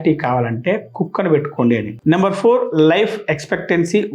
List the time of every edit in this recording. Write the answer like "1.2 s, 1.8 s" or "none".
none